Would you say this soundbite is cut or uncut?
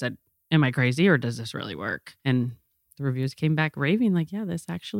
cut